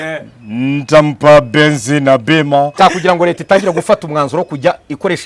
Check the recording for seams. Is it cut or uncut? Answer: cut